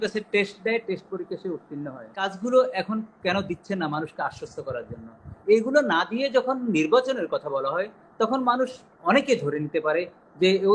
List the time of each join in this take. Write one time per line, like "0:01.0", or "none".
0:02.2